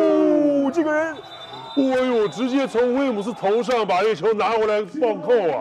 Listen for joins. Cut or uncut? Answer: uncut